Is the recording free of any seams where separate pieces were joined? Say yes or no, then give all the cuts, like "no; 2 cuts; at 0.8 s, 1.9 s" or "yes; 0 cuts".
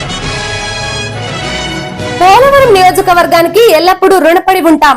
yes; 0 cuts